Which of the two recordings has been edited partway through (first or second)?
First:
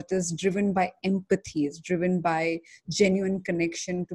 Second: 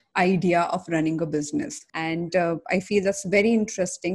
second